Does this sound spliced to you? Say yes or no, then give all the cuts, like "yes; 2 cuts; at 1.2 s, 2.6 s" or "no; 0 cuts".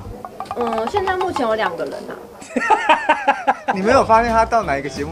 yes; 1 cut; at 3.8 s